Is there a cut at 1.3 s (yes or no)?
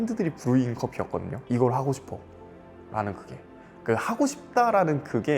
yes